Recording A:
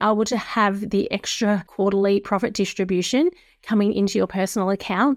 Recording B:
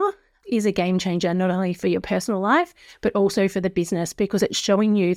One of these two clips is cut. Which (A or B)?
A